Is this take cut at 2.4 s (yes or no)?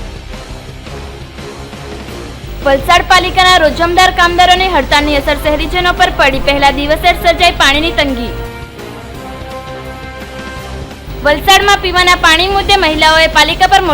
yes